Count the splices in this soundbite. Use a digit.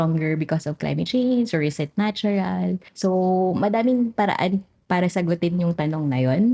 1